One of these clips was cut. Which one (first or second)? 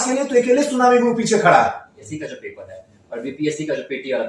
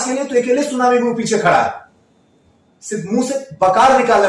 first